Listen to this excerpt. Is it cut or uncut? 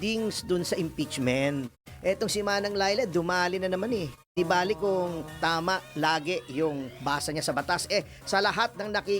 cut